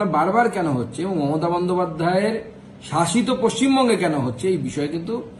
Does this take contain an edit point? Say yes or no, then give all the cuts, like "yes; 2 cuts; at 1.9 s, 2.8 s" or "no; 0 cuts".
no; 0 cuts